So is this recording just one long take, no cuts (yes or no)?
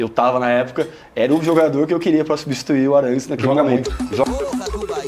no